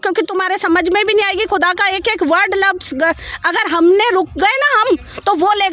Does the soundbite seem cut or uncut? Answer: uncut